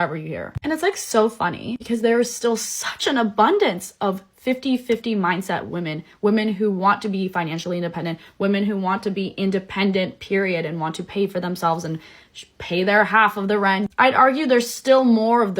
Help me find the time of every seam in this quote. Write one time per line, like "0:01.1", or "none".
0:06.5
0:13.7